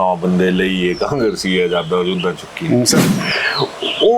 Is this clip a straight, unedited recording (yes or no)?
no